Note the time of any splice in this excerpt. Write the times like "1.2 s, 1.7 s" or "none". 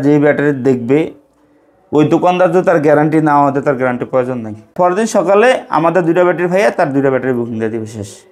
4.7 s